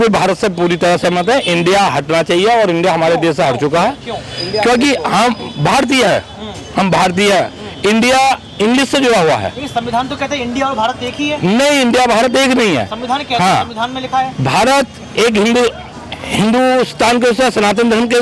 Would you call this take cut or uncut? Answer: uncut